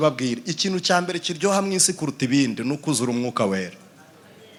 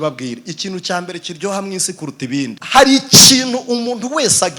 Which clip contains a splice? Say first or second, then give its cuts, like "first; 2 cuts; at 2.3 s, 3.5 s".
second; 1 cut; at 2.6 s